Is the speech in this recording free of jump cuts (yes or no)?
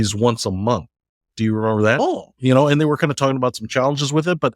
no